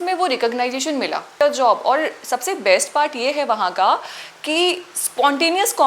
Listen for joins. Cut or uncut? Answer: cut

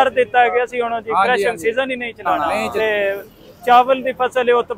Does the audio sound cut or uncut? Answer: cut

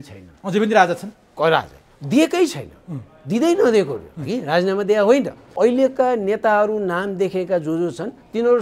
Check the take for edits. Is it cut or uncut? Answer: cut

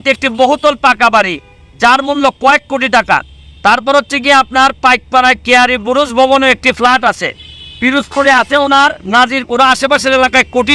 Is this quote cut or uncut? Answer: uncut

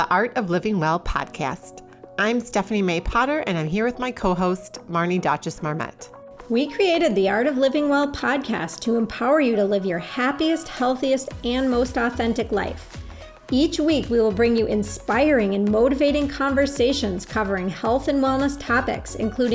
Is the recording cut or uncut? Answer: uncut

